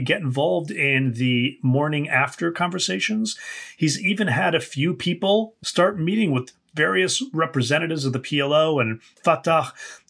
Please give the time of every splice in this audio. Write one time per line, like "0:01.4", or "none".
0:05.6
0:09.2